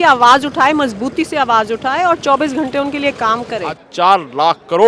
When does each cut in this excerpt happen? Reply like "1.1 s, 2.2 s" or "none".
3.8 s